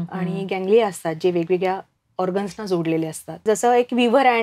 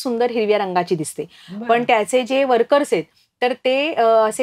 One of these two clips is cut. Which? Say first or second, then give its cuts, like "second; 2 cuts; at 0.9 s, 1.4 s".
first; 1 cut; at 3.4 s